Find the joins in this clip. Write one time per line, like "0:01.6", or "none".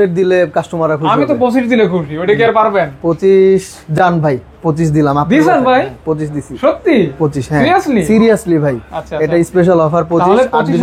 none